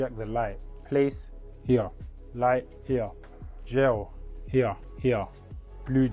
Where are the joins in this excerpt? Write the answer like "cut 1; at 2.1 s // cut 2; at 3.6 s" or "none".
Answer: cut 1; at 4.9 s

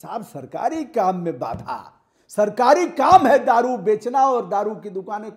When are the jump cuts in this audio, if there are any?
none

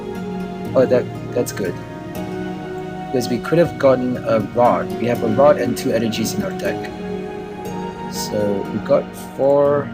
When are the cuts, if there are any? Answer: none

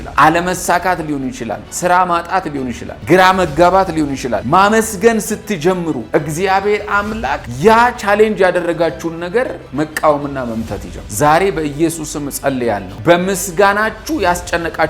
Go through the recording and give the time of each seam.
cut 1; at 9.6 s

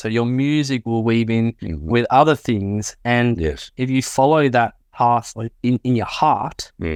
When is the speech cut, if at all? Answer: none

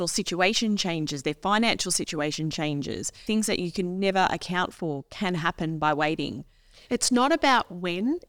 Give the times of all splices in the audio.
cut 1; at 3.2 s

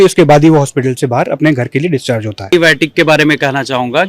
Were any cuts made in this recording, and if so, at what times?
cut 1; at 2.5 s

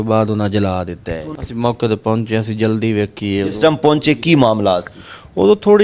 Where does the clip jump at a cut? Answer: cut 1; at 1.3 s

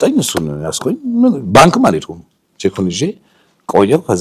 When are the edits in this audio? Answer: none

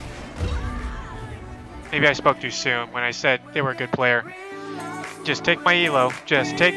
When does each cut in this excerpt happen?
none

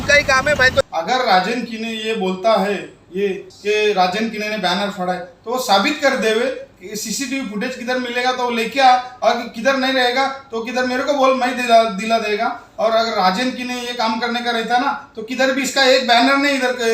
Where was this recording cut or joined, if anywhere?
cut 1; at 0.8 s // cut 2; at 3.5 s

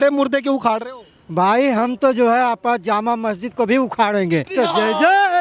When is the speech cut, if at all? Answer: cut 1; at 4.5 s

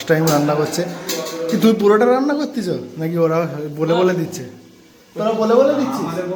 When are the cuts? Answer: none

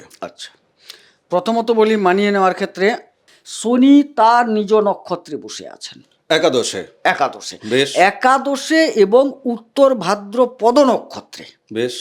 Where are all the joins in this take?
cut 1; at 3.1 s

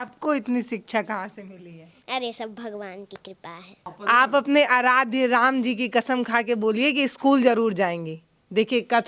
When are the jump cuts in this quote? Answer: cut 1; at 3.9 s

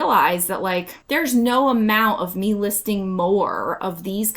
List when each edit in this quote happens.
cut 1; at 1.0 s

